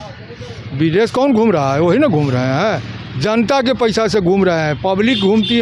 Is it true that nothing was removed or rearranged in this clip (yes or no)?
yes